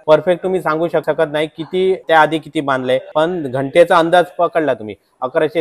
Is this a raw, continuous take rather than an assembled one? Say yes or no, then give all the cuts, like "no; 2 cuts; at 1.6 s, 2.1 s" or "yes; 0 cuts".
no; 2 cuts; at 1.0 s, 2.0 s